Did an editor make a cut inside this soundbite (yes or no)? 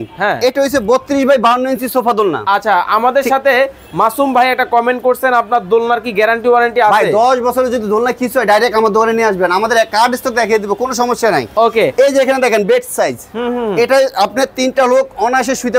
no